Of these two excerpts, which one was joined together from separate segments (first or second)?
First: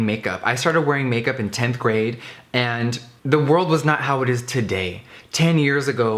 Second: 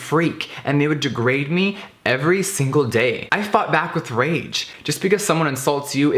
second